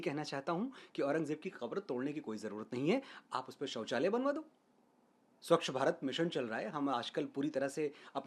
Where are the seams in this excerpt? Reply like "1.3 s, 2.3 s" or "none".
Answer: none